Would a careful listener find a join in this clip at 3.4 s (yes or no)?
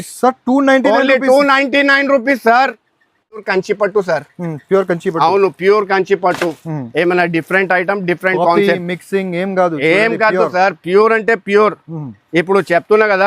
yes